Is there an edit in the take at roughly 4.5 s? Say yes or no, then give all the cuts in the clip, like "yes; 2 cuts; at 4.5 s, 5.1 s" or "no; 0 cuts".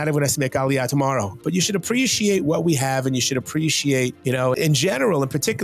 yes; 2 cuts; at 1.4 s, 4.5 s